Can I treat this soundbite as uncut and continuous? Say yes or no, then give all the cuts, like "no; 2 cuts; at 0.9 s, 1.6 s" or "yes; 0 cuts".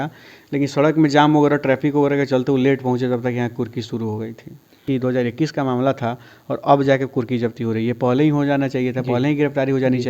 no; 1 cut; at 4.8 s